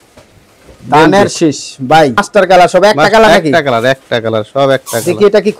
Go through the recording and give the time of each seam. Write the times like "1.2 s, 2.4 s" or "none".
2.2 s

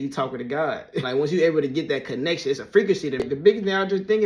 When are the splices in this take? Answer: 1.1 s, 3.2 s

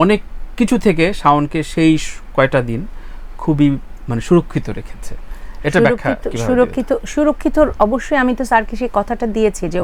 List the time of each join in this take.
none

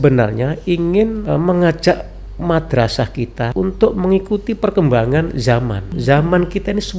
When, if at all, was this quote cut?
1.2 s, 3.5 s, 5.9 s

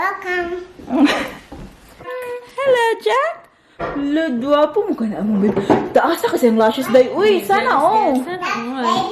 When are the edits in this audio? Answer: 2.1 s

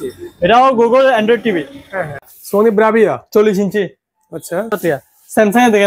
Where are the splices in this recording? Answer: 2.4 s, 4.8 s

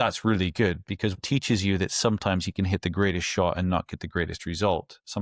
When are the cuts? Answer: 1.2 s

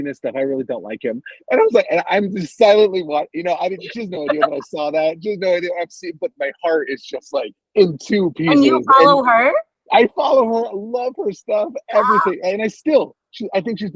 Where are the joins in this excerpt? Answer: 7.6 s, 9.7 s

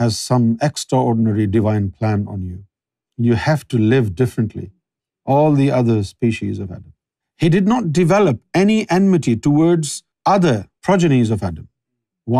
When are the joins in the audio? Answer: 10.4 s

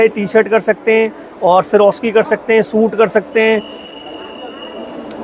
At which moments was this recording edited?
none

